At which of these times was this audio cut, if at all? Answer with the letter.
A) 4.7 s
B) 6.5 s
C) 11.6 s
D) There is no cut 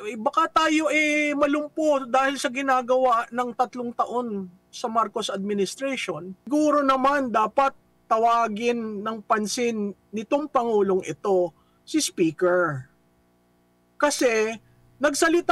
B